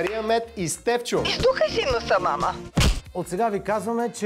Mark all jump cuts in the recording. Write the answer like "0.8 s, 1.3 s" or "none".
1.3 s, 3.0 s